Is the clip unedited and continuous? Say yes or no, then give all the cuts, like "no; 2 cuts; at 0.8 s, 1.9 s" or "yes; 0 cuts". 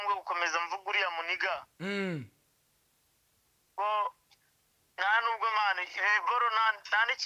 yes; 0 cuts